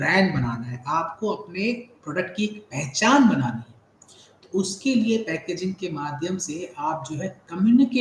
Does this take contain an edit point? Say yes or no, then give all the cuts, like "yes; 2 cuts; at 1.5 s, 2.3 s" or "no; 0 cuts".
no; 0 cuts